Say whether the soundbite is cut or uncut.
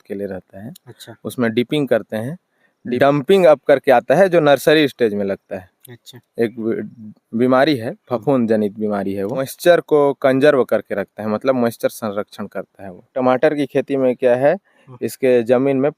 cut